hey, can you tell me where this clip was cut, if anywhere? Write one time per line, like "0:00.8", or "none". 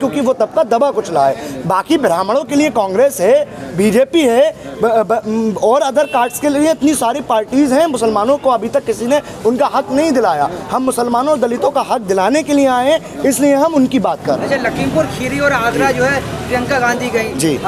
none